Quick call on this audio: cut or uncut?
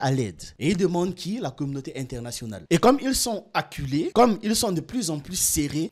cut